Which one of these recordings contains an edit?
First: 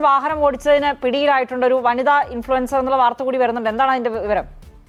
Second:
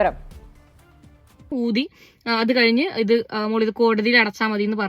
second; 1 cut; at 1.5 s

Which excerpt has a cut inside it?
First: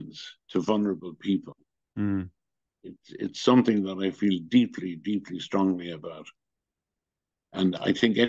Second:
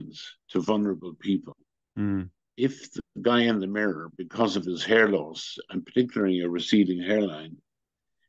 second; 1 cut; at 2.4 s

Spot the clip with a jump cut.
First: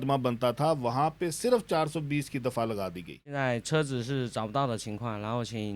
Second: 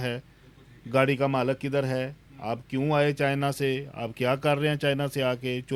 first; 1 cut; at 3.2 s

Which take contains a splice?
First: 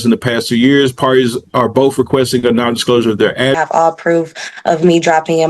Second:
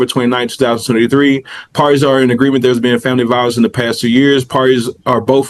first; 1 cut; at 3.6 s

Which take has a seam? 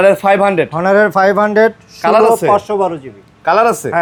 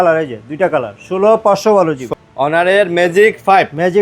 second; 1 cut; at 2.1 s

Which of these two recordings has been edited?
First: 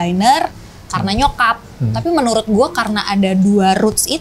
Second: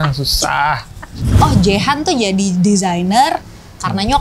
second; 1 cut; at 1.3 s

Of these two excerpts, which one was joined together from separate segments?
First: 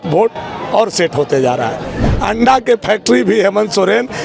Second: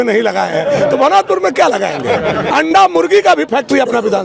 first; 1 cut; at 2.1 s

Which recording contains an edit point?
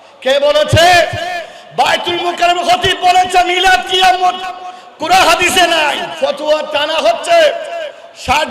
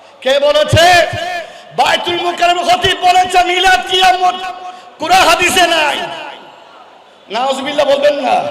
first; 1 cut; at 6.1 s

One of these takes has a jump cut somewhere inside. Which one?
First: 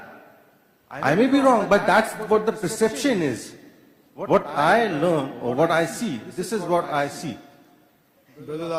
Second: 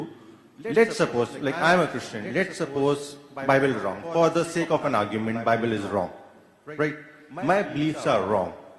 first; 1 cut; at 5.5 s

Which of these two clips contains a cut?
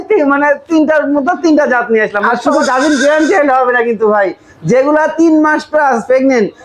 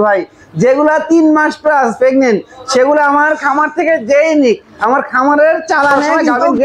first; 1 cut; at 2.3 s

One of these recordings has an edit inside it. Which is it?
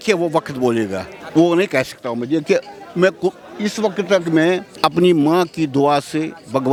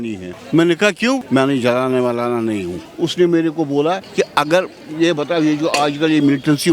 second; 3 cuts; at 1.2 s, 2.8 s, 4.1 s

